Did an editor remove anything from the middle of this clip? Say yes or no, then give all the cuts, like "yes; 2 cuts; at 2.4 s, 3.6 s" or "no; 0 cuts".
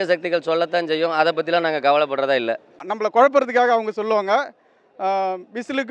yes; 1 cut; at 2.9 s